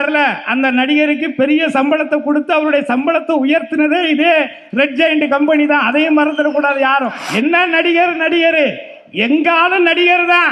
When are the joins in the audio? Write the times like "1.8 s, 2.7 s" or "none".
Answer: 7.2 s